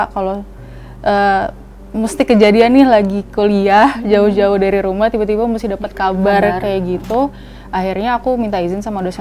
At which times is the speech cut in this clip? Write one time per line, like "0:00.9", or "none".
none